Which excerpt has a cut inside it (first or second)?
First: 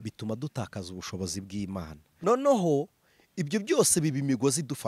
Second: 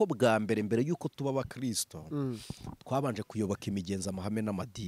first